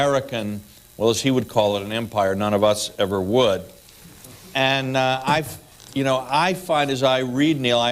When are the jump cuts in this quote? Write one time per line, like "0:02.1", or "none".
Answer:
0:06.6